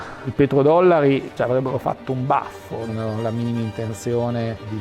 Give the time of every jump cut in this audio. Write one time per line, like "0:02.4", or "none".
0:02.9